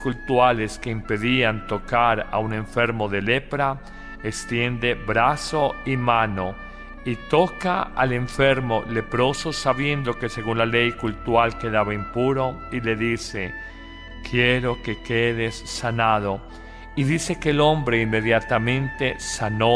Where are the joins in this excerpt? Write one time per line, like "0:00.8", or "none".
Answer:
0:12.2